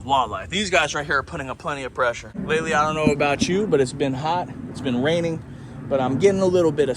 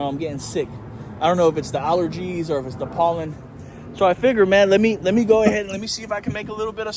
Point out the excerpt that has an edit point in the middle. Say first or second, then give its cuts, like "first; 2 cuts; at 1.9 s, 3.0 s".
first; 1 cut; at 2.4 s